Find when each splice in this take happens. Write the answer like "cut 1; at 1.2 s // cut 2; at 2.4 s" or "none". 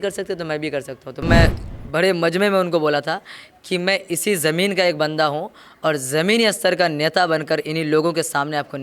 cut 1; at 1.2 s